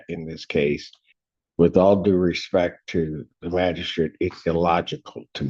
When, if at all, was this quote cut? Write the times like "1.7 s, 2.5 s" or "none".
none